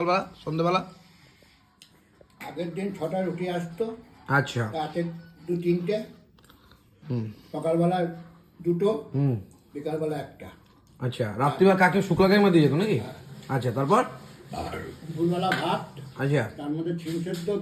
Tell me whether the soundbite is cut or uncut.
uncut